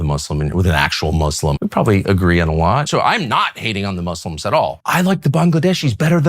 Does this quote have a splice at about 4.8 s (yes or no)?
yes